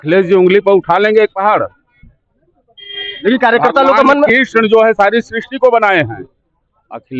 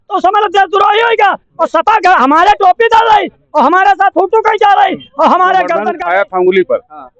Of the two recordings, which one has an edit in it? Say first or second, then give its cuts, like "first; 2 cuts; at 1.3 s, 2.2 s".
second; 1 cut; at 5.9 s